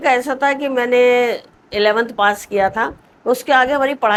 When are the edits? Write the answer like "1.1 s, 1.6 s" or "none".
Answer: none